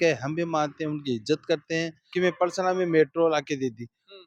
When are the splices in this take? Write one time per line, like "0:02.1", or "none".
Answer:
0:02.0